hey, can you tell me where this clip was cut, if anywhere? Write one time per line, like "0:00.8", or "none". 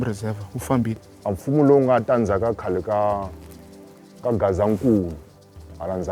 0:01.1